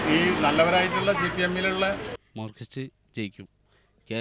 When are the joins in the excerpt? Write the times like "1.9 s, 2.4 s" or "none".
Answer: 2.1 s